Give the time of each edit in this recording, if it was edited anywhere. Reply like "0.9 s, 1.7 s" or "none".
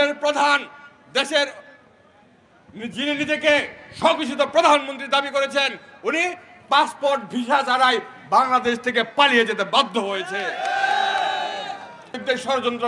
none